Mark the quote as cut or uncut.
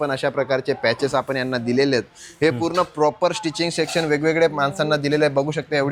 uncut